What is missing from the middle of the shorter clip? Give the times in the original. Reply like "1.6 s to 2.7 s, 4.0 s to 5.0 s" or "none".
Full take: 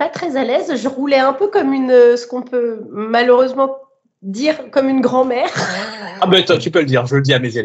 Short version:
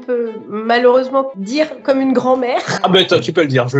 3.8 s to 4.3 s, 5.6 s to 6.1 s